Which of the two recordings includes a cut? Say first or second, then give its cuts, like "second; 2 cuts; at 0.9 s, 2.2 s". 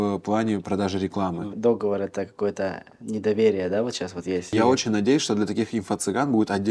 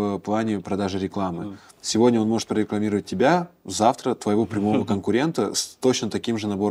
first; 2 cuts; at 1.5 s, 4.5 s